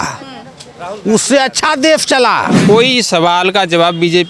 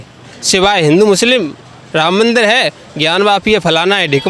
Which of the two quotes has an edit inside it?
first; 1 cut; at 2.5 s

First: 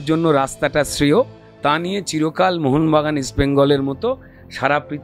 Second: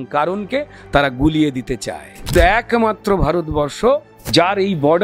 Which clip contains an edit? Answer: second; 2 cuts; at 2.3 s, 4.2 s

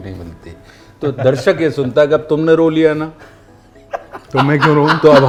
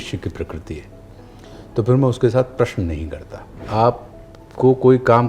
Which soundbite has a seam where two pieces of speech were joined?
second; 1 cut; at 3.6 s

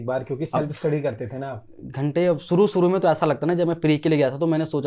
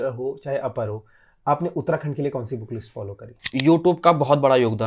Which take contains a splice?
second; 1 cut; at 3.5 s

